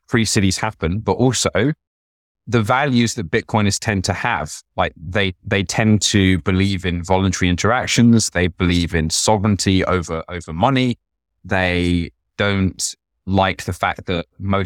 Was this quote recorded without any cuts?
yes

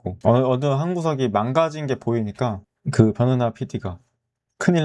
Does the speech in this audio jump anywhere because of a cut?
no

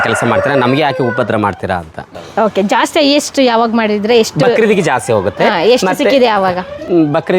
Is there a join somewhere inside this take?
yes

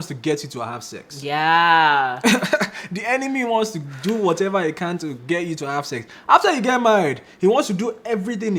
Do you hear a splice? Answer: no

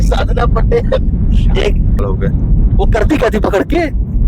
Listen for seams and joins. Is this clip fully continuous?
no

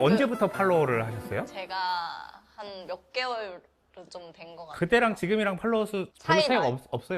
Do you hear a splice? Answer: no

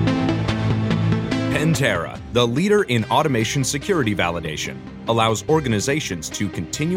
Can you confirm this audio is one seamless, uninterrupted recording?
no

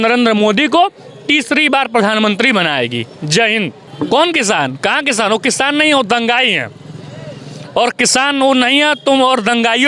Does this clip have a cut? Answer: yes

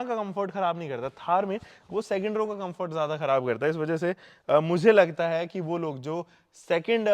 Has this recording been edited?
no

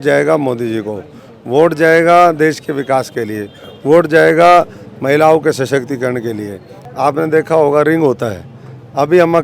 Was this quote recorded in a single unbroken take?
no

